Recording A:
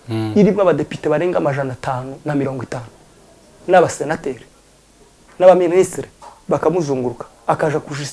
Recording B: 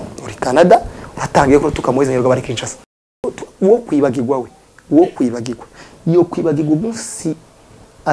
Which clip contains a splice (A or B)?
B